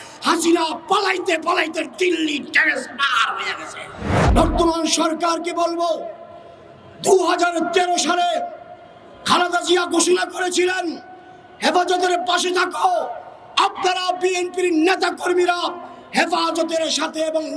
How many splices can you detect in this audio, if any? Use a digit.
1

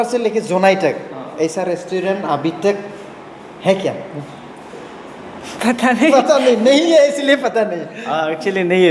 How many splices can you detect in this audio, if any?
0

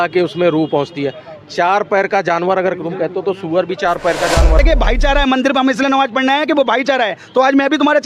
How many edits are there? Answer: 1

